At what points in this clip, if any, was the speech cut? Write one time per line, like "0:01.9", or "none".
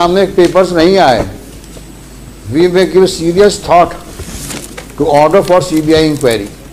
none